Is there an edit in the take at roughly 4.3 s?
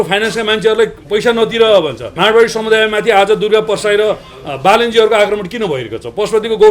no; 1 cut; at 2.1 s

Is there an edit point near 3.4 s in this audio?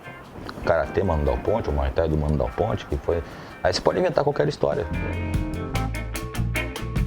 no; 1 cut; at 4.9 s

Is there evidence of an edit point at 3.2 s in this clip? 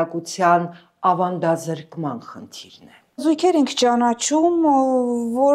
yes; 1 cut; at 3.2 s

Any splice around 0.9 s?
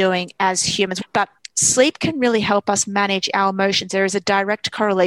yes; 1 cut; at 0.9 s

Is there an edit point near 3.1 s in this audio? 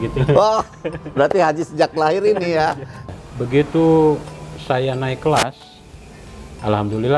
yes; 1 cut; at 3.1 s

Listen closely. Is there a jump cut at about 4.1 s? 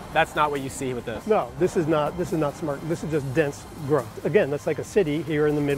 yes; 1 cut; at 4.1 s

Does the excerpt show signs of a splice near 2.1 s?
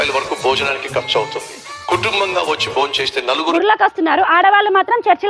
no; 1 cut; at 3.5 s

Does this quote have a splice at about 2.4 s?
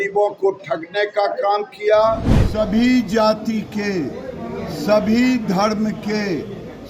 yes; 1 cut; at 2.4 s

